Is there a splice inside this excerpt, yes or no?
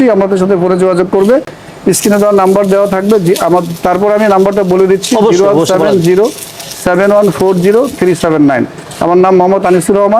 no